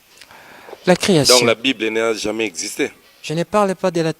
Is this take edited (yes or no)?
no